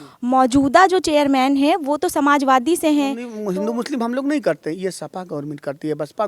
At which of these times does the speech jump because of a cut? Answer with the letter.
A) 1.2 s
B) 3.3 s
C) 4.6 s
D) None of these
B